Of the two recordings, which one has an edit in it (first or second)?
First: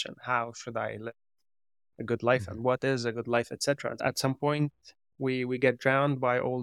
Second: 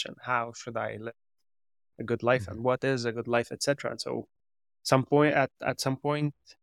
first